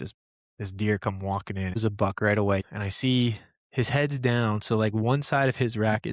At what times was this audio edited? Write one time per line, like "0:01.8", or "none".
0:01.8
0:02.7